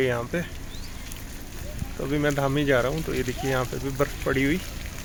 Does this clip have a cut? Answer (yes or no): no